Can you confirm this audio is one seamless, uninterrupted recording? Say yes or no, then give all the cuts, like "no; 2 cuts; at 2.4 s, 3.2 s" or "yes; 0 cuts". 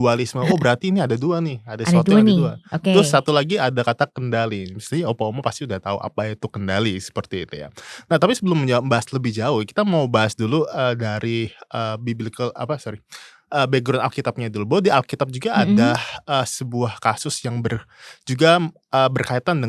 yes; 0 cuts